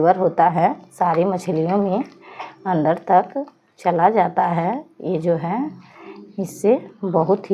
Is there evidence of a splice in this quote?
no; 0 cuts

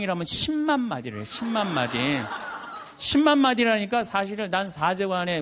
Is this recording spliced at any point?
no; 0 cuts

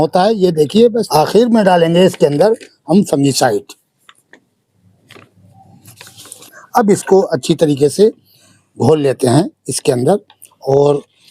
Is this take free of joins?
no; 2 cuts; at 1.1 s, 6.4 s

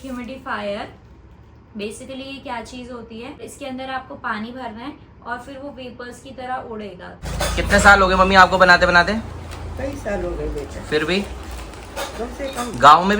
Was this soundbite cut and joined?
yes; 2 cuts; at 3.4 s, 7.1 s

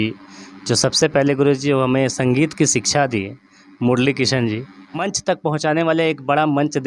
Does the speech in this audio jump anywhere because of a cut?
yes; 1 cut; at 5.1 s

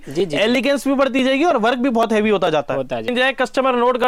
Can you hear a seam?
yes; 1 cut; at 3.1 s

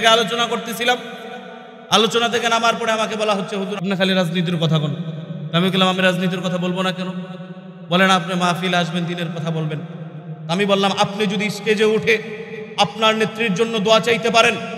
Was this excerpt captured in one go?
no; 1 cut; at 3.8 s

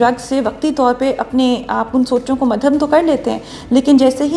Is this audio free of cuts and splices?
yes; 0 cuts

